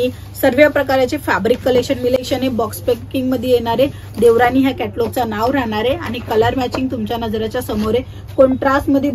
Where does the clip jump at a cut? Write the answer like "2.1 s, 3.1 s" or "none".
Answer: 2.2 s